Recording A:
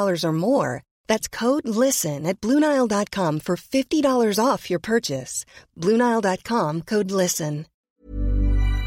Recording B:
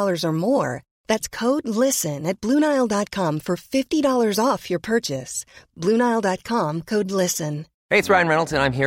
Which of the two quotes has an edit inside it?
A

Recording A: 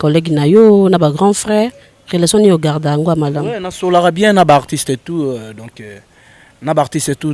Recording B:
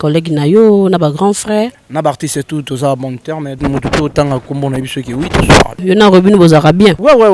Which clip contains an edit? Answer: B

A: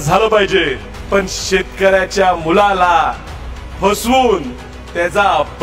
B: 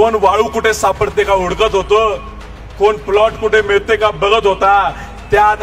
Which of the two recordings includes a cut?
A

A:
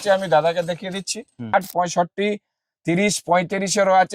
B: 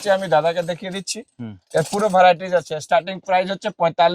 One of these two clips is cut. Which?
A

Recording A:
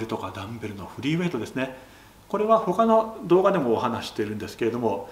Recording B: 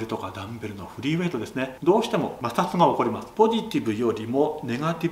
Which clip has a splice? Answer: B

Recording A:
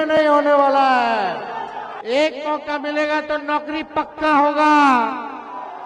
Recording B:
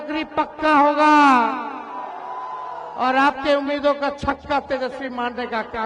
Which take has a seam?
A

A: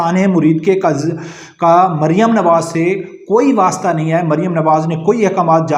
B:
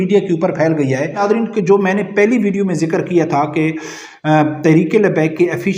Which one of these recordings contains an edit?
B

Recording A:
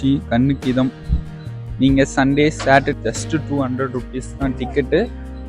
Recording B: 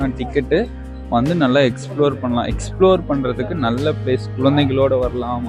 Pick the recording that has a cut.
A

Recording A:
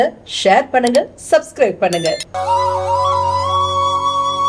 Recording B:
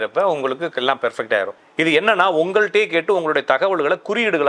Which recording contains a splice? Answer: B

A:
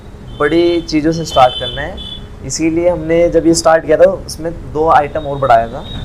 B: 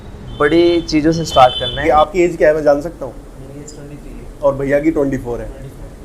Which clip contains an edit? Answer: B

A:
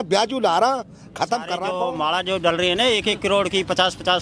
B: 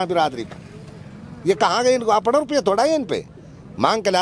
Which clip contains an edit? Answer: A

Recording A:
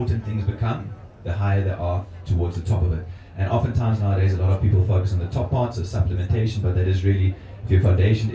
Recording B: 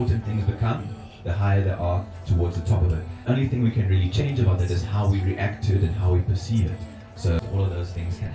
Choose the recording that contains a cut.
B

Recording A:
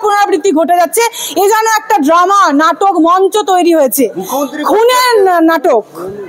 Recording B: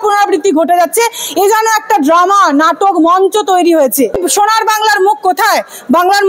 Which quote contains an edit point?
B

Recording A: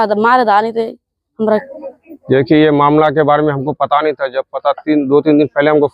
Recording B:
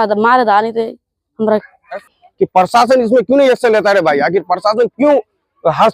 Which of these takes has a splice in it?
B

